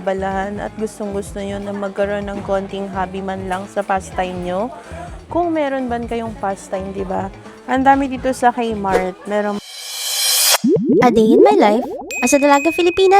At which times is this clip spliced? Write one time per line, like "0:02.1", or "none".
0:09.6